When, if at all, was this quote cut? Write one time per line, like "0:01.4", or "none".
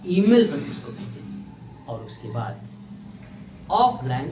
none